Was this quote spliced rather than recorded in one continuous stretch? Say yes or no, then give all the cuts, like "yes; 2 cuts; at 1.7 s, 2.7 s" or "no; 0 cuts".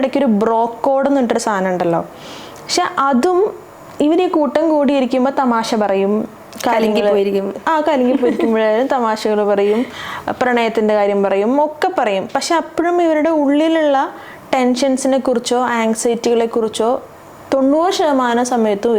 no; 0 cuts